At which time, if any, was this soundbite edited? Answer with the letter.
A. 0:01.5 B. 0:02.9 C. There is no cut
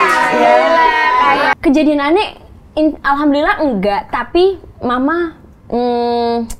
A